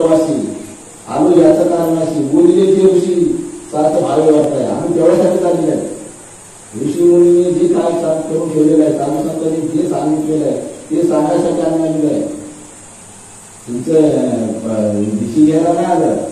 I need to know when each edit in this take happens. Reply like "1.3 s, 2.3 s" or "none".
none